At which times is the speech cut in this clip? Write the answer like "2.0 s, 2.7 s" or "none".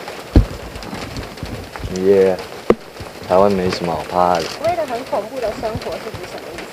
4.6 s